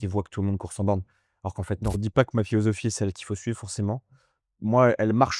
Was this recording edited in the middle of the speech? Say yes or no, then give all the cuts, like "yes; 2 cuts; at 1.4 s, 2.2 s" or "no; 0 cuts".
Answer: yes; 1 cut; at 2.0 s